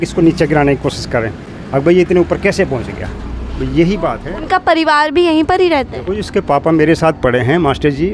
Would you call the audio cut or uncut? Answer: uncut